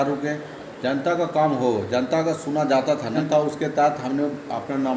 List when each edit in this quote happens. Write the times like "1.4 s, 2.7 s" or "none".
3.2 s

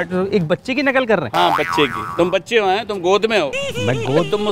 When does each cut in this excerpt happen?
none

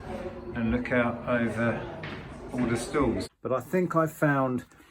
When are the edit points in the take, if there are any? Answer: 3.3 s

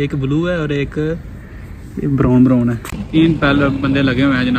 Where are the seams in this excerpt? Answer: 2.9 s

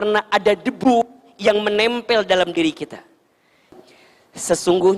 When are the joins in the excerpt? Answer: 3.7 s

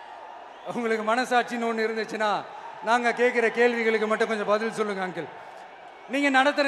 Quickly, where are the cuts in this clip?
none

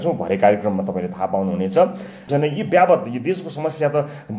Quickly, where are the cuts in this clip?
2.3 s

